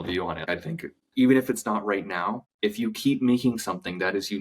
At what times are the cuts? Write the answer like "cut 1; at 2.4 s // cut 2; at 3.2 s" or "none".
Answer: cut 1; at 0.7 s // cut 2; at 2.4 s

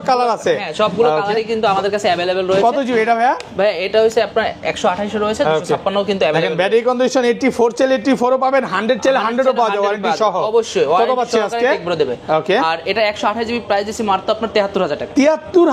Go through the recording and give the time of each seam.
none

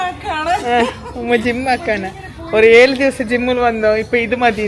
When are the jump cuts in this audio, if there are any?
none

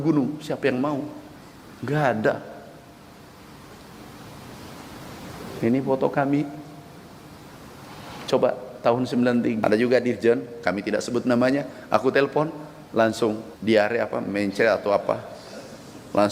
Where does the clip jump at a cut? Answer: cut 1; at 9.6 s // cut 2; at 13.5 s

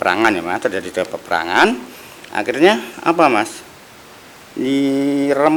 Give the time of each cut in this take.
none

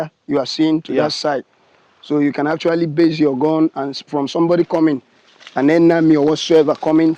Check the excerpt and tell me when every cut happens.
none

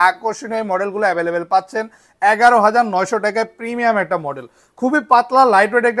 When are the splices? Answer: none

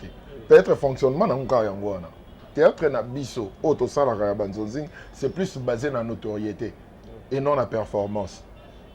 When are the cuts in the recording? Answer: cut 1; at 2.4 s

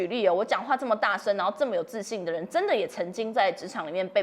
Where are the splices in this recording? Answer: none

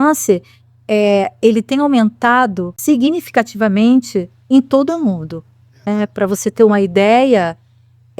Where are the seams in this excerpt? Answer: cut 1; at 2.7 s

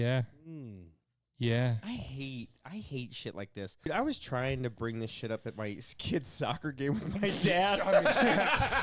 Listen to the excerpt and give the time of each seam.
cut 1; at 3.9 s

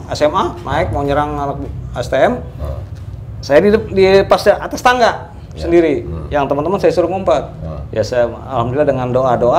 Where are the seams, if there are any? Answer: none

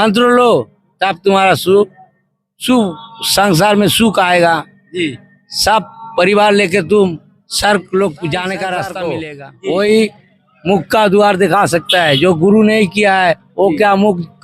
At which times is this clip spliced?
cut 1; at 9.2 s

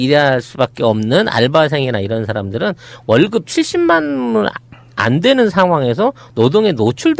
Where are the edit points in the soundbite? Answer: none

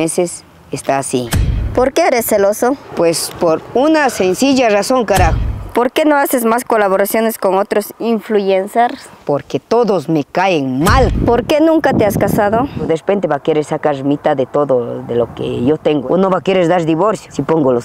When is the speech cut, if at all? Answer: cut 1; at 1.7 s // cut 2; at 5.3 s // cut 3; at 9.1 s // cut 4; at 11.2 s // cut 5; at 12.8 s // cut 6; at 16.0 s

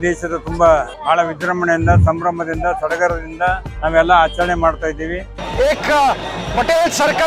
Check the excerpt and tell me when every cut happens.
cut 1; at 0.9 s // cut 2; at 3.7 s // cut 3; at 5.4 s

